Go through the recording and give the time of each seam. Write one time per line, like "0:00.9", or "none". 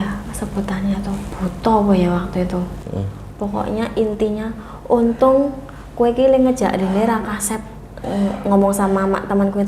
0:01.3

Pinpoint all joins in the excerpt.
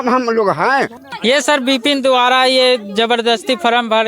0:01.0

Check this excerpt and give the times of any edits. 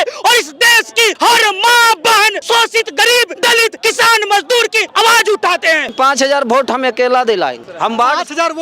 0:01.1
0:02.4
0:03.6
0:04.8
0:05.9
0:07.6

